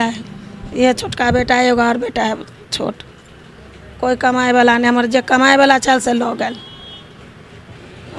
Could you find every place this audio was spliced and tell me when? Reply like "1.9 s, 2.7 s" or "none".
none